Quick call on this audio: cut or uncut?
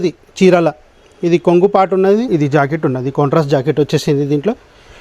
cut